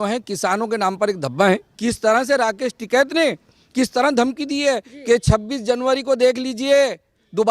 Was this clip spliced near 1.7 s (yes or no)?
yes